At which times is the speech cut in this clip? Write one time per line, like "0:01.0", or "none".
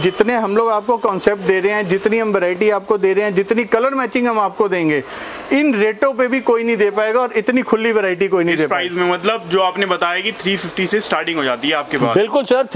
none

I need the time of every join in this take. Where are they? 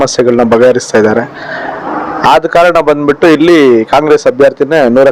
none

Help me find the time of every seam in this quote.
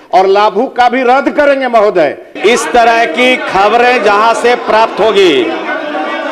0:02.3

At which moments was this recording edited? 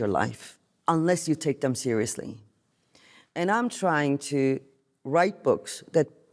none

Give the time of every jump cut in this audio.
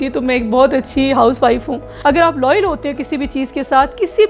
0:01.8

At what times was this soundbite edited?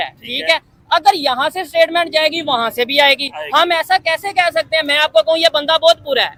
none

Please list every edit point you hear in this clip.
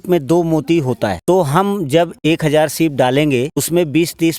0:01.2
0:02.2
0:03.6

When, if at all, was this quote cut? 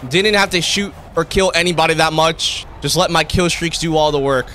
none

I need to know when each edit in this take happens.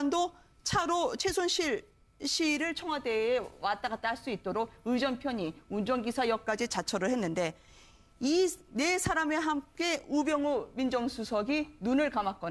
0:08.1

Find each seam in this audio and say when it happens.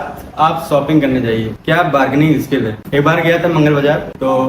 0:01.5

